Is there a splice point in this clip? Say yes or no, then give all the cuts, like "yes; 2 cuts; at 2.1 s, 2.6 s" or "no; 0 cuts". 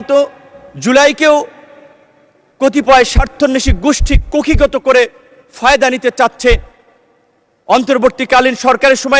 no; 0 cuts